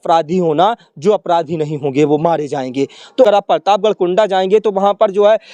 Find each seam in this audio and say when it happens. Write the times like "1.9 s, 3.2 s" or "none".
3.3 s